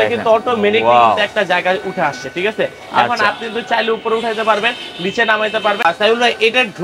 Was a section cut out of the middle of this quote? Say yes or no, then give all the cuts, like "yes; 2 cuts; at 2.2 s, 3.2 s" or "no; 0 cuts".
no; 0 cuts